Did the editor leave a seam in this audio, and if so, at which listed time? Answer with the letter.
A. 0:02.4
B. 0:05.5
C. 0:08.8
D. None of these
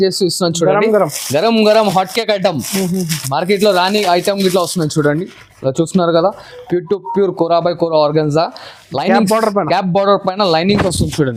D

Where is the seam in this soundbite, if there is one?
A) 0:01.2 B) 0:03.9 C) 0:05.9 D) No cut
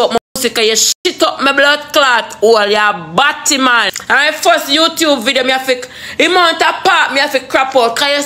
B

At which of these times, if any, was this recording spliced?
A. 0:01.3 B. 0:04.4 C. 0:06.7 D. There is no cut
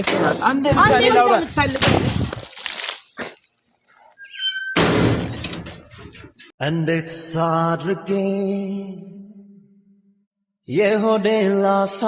C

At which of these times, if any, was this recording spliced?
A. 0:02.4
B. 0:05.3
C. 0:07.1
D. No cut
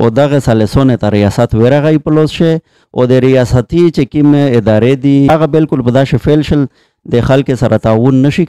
B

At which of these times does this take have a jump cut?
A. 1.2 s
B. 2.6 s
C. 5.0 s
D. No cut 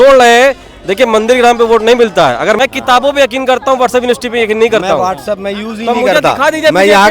B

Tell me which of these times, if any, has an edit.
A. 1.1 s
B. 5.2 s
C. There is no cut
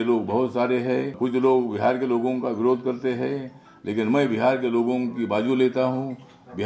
A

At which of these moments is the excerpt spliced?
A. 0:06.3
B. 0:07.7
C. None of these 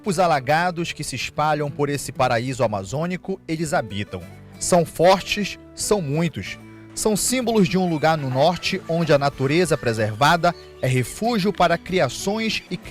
C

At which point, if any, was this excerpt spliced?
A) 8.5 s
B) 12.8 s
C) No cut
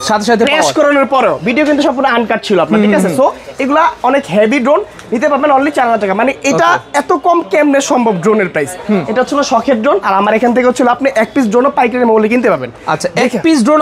C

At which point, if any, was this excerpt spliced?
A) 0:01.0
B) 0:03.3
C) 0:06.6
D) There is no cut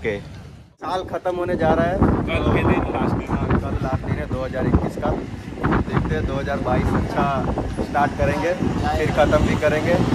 A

